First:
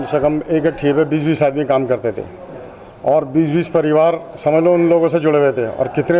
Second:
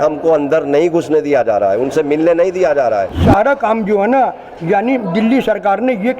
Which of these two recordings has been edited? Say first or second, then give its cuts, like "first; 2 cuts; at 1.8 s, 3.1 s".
second; 1 cut; at 3.2 s